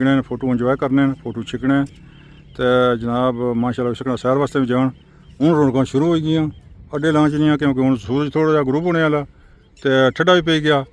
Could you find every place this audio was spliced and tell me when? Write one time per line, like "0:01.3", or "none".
none

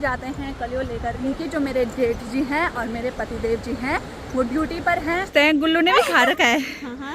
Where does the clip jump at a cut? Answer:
0:01.2
0:05.3

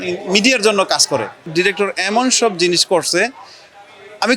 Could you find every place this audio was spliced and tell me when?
0:01.5

